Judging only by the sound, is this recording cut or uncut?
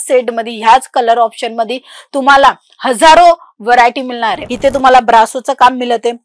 cut